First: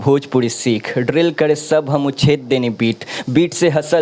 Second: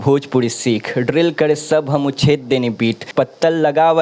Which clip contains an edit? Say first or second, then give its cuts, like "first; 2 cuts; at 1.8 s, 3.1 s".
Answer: second; 1 cut; at 3.1 s